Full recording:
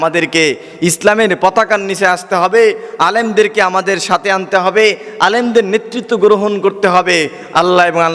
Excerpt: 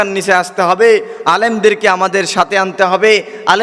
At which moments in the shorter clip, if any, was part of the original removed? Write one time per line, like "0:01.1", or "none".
none